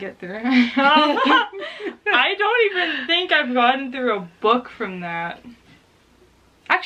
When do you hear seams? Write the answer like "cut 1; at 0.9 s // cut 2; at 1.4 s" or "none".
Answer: none